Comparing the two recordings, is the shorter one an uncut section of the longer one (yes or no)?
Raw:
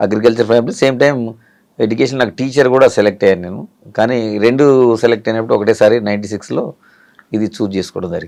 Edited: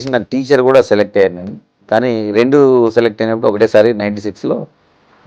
yes